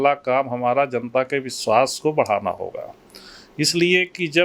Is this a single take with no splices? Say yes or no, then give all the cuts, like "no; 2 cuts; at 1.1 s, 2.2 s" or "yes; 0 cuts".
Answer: yes; 0 cuts